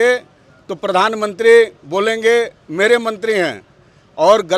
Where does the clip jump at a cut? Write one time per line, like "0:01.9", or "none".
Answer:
none